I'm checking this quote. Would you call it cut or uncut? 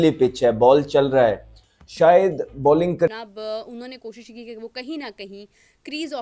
cut